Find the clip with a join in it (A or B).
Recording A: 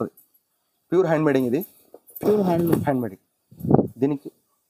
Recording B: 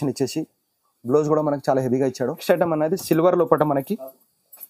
B